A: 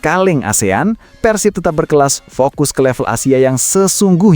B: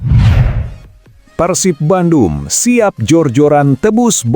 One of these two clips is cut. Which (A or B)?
B